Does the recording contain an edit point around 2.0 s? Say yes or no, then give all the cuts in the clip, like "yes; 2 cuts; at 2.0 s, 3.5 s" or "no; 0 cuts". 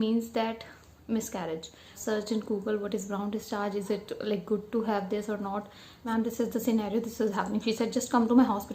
yes; 2 cuts; at 2.0 s, 6.1 s